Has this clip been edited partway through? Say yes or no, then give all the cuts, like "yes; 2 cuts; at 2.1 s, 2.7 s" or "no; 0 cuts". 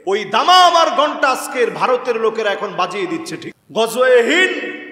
yes; 1 cut; at 3.4 s